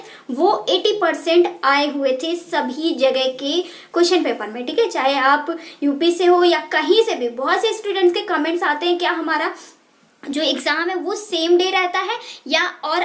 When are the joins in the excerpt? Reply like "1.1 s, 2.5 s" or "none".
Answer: none

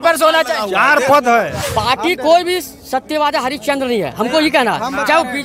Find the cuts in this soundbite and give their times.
1.6 s

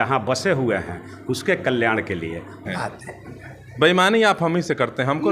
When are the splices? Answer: 2.7 s

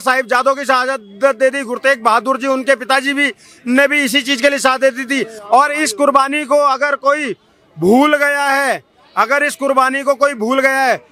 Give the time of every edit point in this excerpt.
none

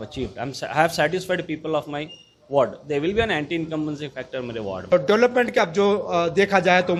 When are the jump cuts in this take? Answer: none

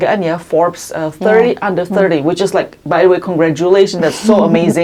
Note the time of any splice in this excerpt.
none

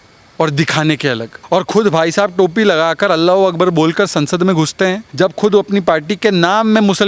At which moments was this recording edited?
1.3 s, 5.0 s

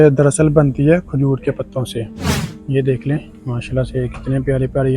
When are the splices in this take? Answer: 2.0 s

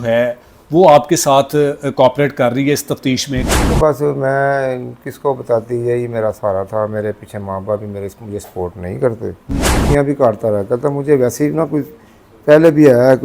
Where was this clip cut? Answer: 3.6 s, 9.8 s

